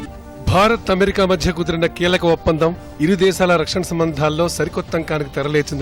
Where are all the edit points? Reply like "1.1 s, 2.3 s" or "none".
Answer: none